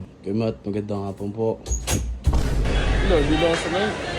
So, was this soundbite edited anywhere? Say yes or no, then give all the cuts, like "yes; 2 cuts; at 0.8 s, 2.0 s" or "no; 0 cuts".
yes; 1 cut; at 2.7 s